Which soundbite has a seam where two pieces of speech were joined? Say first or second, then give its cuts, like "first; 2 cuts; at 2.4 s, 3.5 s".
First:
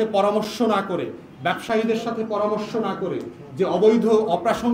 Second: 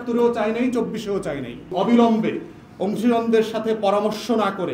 second; 1 cut; at 1.7 s